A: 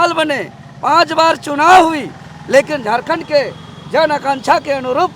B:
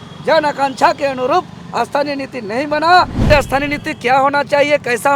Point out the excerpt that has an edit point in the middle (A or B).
B